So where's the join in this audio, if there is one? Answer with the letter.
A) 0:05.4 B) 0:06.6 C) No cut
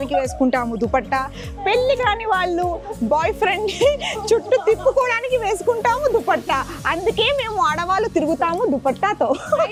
C